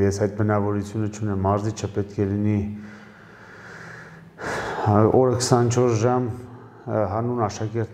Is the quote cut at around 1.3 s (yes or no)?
no